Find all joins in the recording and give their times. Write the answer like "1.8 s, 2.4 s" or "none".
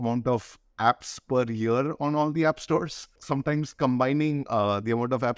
3.2 s